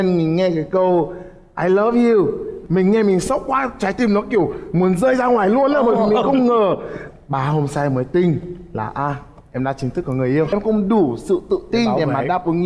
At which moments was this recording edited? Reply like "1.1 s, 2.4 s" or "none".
10.5 s